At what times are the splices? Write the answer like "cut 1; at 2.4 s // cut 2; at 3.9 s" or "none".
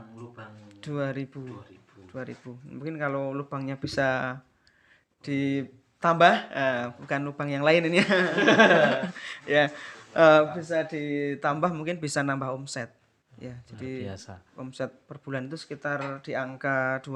none